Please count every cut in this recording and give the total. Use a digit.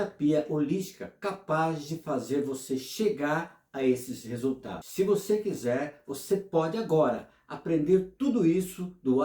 1